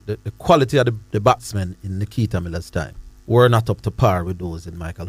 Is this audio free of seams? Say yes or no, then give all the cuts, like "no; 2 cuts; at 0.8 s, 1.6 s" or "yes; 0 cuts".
no; 2 cuts; at 1.0 s, 3.1 s